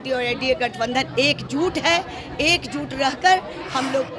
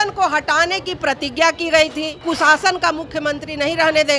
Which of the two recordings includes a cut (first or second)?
second